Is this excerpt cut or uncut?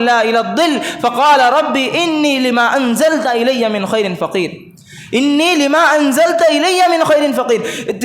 uncut